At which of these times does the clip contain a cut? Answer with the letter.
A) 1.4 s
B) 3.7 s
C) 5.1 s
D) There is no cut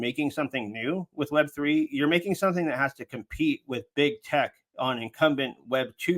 D